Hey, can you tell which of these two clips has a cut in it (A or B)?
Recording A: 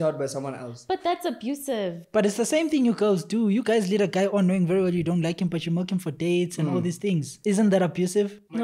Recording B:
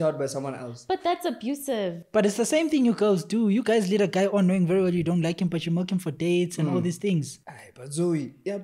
B